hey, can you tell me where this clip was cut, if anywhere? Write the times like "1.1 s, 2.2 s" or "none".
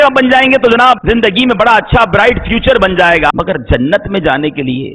1.0 s, 3.3 s